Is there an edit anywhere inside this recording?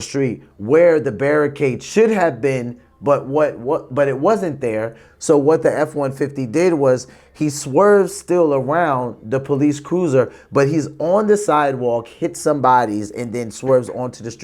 no; 0 cuts

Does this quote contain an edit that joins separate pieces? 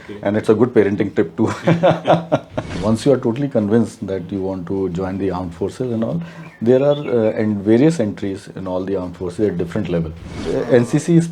yes; 2 cuts; at 2.7 s, 10.4 s

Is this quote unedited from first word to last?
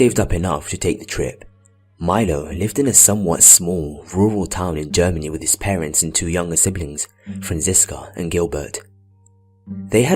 no; 1 cut; at 6.3 s

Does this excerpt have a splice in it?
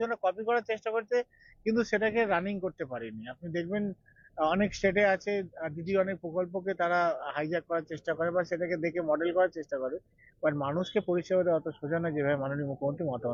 no; 0 cuts

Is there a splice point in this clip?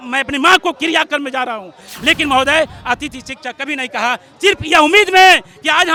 no; 0 cuts

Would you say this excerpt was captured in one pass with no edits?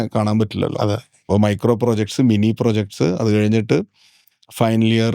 no; 1 cut; at 1.2 s

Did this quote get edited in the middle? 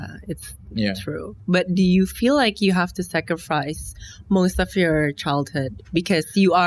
no; 0 cuts

